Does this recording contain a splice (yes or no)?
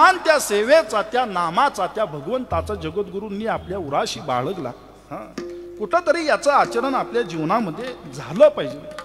no